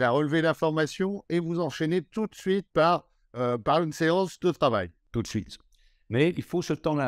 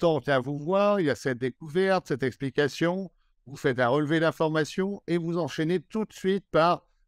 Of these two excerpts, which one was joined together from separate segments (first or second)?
first